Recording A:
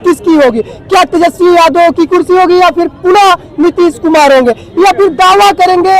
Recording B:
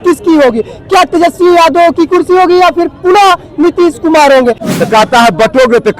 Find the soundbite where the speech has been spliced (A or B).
B